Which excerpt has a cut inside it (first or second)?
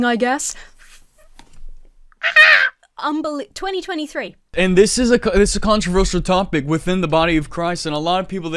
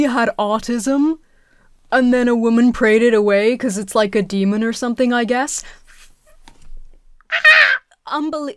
first